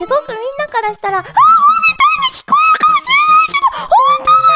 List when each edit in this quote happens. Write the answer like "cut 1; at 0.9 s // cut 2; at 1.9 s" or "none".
none